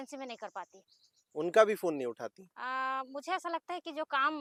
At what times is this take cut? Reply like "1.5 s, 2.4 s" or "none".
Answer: none